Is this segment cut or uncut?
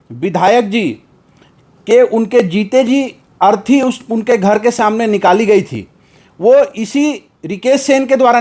uncut